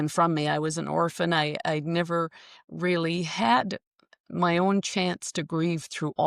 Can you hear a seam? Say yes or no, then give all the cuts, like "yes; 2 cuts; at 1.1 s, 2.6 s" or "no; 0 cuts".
no; 0 cuts